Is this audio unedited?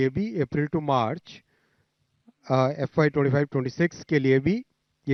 yes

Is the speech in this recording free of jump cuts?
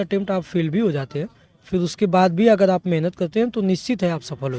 yes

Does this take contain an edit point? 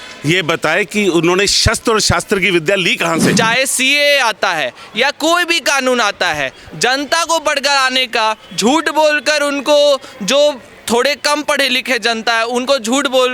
yes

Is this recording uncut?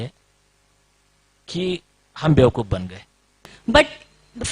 no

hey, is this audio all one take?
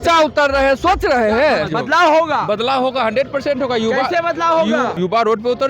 no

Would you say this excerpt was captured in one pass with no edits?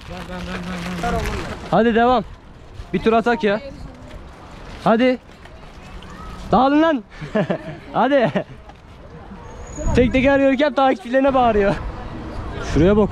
no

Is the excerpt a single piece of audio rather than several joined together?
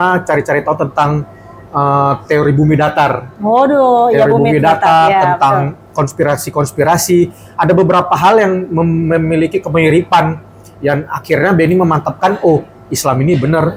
yes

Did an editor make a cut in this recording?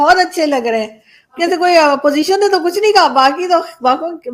yes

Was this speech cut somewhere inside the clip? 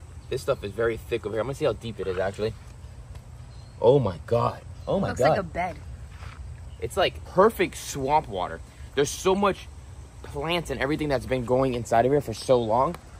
no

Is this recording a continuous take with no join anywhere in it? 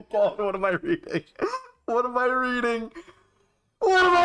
yes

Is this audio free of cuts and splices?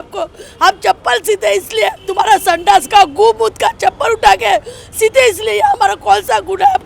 no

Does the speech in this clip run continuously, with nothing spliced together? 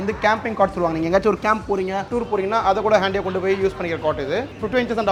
yes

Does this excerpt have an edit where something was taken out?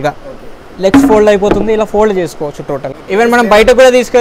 no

